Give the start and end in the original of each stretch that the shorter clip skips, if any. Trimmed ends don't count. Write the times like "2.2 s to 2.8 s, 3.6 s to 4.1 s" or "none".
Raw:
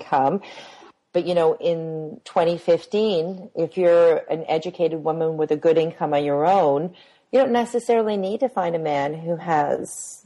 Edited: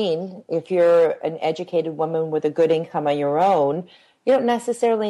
none